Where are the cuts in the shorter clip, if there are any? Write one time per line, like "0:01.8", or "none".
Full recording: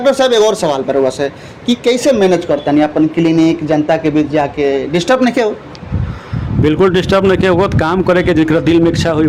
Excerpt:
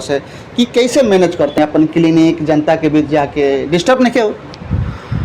0:01.6